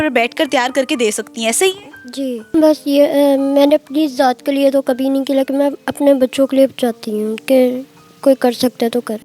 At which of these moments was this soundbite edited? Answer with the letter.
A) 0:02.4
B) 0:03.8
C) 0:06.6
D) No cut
A